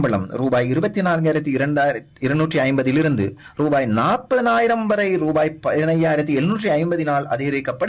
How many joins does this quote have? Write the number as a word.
zero